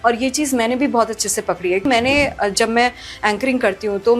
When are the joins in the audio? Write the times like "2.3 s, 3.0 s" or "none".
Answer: 1.9 s